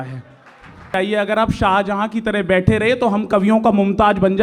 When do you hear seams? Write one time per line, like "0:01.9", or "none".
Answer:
0:00.9